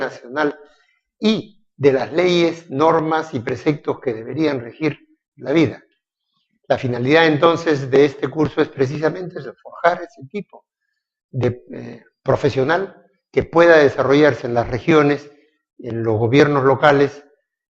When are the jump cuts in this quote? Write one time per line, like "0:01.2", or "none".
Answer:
0:05.8